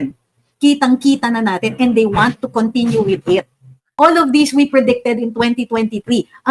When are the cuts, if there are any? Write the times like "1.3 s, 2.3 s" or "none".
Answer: 3.8 s